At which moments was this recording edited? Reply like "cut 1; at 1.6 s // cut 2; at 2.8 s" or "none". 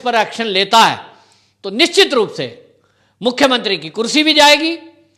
none